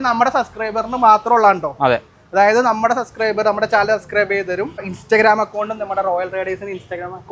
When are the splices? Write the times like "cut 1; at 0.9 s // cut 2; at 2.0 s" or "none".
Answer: cut 1; at 4.9 s

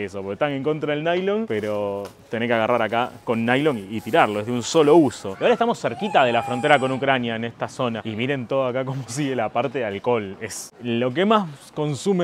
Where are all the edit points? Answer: cut 1; at 5.4 s // cut 2; at 8.0 s

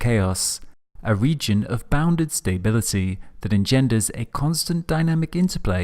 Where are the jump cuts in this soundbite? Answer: cut 1; at 4.1 s

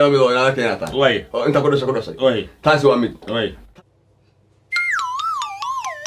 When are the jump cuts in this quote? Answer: cut 1; at 3.1 s

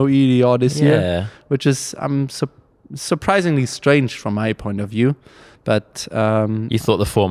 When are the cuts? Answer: none

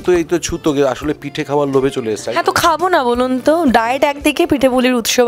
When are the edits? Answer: none

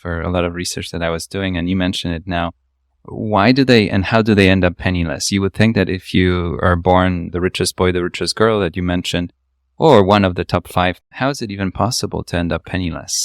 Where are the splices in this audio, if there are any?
cut 1; at 7.3 s // cut 2; at 11.1 s

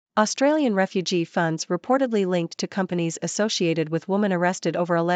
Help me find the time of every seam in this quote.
none

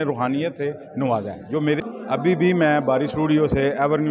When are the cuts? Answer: cut 1; at 1.8 s

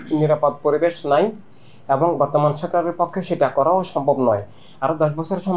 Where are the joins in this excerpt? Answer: none

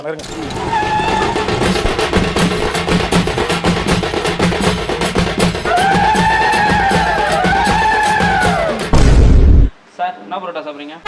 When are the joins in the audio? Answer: none

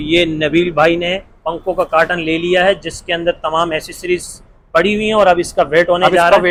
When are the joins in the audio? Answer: none

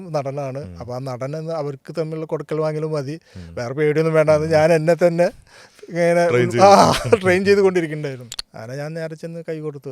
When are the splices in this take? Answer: cut 1; at 8.3 s

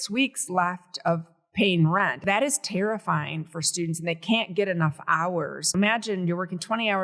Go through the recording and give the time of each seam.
cut 1; at 2.2 s // cut 2; at 5.7 s

